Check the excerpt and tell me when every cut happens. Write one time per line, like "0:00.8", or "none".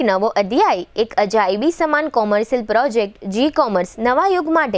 none